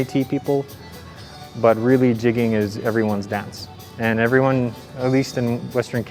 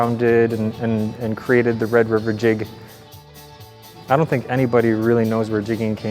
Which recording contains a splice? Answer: second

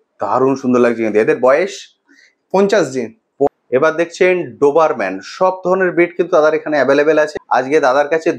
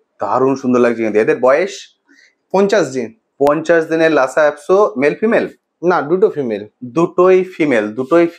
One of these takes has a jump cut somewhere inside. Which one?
first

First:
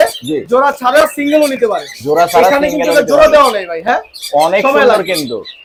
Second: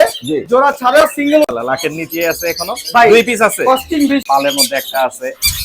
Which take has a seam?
second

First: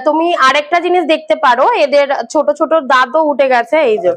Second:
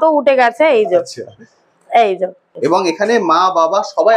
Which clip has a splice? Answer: second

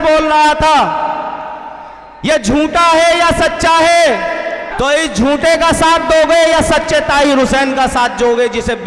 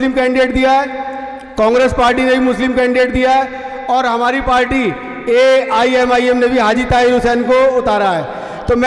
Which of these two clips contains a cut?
first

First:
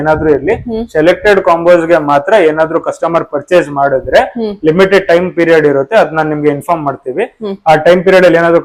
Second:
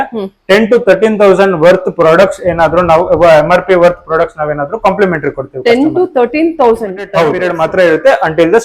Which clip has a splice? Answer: second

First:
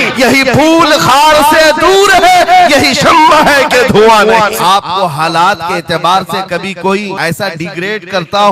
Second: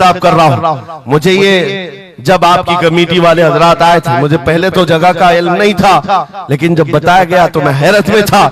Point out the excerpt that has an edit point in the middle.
first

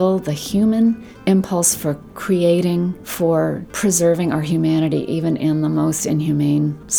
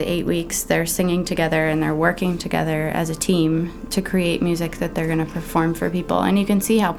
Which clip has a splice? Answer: first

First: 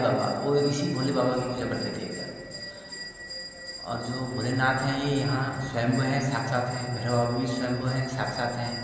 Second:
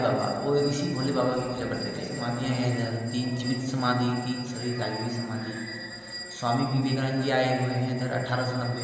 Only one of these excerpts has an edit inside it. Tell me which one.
second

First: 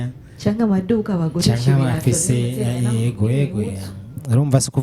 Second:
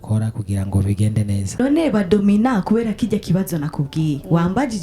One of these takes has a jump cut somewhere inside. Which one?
second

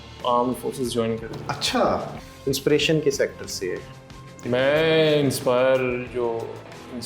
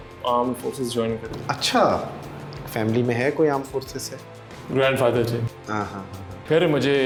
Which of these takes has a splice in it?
first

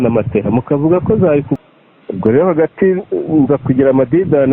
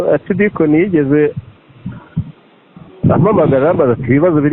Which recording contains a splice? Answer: first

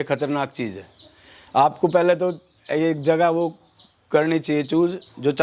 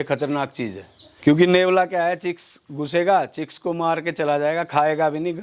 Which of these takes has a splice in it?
second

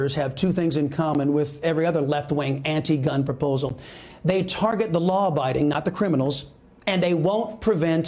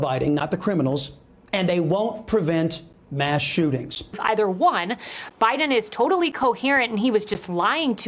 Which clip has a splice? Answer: second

